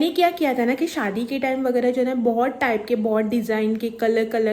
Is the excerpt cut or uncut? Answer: uncut